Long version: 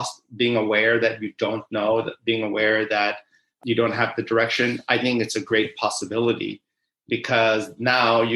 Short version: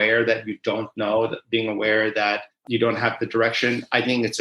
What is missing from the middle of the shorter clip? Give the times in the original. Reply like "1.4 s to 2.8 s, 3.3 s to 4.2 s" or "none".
3.3 s to 3.5 s